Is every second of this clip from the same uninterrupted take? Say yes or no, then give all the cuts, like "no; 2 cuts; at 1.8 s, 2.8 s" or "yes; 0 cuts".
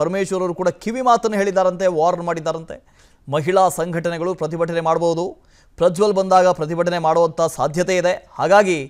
yes; 0 cuts